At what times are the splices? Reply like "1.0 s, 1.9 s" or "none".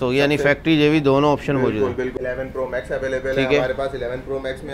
2.1 s